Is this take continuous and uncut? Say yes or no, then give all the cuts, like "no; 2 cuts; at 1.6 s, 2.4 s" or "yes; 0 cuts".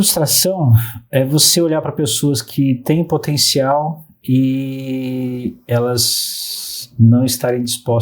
yes; 0 cuts